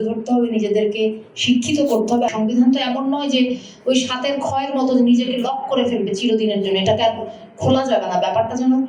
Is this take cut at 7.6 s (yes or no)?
no